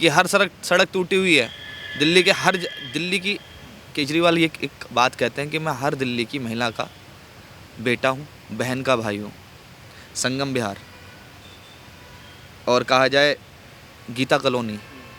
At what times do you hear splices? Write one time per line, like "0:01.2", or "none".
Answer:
none